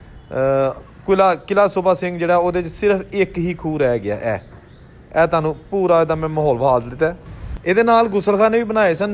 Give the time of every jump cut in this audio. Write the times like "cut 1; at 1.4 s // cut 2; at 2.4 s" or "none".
none